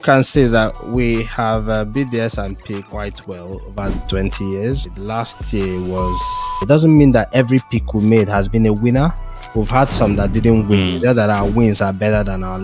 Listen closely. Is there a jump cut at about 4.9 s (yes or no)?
yes